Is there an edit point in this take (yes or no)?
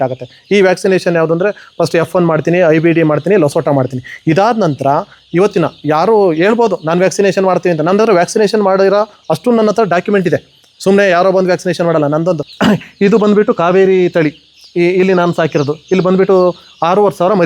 yes